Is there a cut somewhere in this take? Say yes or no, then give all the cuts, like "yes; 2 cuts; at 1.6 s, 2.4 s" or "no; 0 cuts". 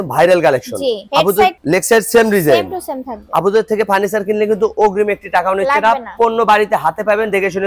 no; 0 cuts